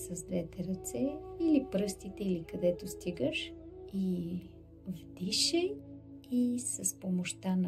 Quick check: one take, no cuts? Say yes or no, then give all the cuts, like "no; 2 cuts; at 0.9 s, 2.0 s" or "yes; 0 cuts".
yes; 0 cuts